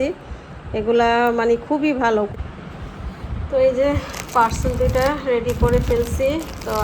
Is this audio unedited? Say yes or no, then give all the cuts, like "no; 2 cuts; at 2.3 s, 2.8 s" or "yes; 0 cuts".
no; 1 cut; at 2.3 s